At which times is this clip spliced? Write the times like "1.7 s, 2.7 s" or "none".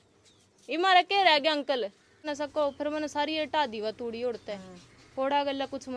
2.3 s